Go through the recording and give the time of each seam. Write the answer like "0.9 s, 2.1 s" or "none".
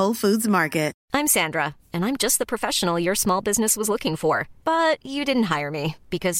1.0 s